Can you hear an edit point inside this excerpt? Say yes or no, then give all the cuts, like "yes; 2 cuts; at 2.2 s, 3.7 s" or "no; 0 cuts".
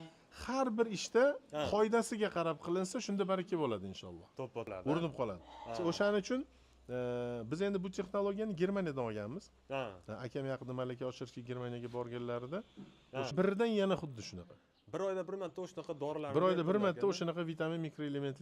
yes; 2 cuts; at 4.7 s, 13.3 s